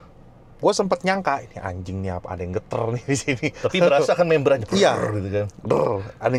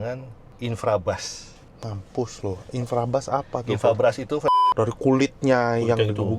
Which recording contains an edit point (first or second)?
second